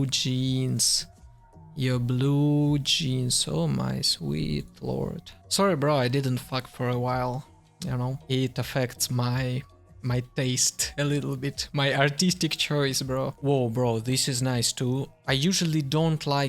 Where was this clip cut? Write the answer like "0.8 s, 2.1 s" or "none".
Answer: none

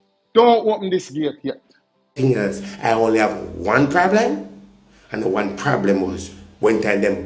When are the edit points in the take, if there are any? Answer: 2.2 s

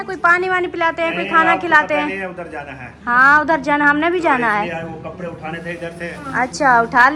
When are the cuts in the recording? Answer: none

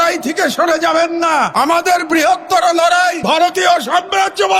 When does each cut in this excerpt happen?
1.5 s, 3.2 s

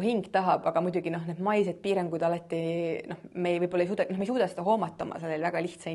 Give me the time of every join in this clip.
none

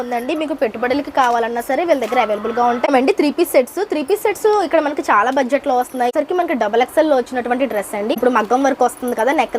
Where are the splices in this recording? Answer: 2.9 s, 6.1 s, 8.1 s

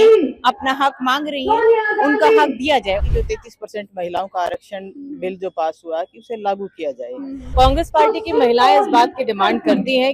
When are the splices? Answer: 3.1 s, 7.4 s

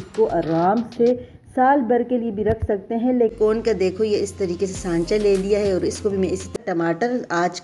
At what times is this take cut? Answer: 3.3 s, 6.5 s

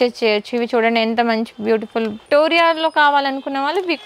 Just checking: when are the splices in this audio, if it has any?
2.2 s

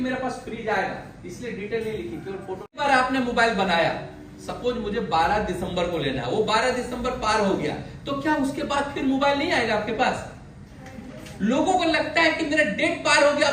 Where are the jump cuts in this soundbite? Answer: 2.8 s

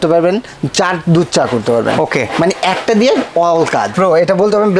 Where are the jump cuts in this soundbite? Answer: 3.9 s

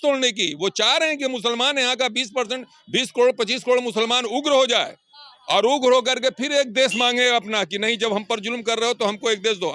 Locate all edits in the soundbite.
none

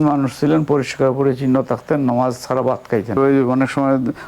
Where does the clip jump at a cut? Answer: 3.2 s

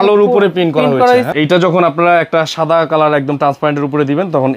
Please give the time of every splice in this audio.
1.3 s

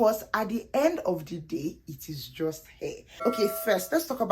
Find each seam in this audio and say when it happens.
3.2 s

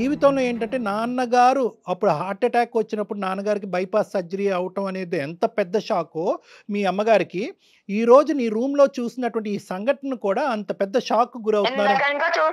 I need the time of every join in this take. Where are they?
none

